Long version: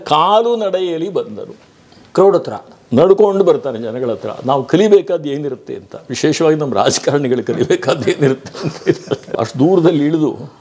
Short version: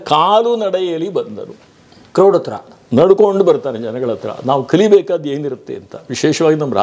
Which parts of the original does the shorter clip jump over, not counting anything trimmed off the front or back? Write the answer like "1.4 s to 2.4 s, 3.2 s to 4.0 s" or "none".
none